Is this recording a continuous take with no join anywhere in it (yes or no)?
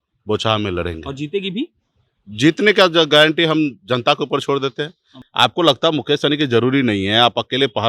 no